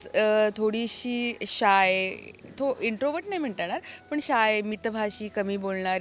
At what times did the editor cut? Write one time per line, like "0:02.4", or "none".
none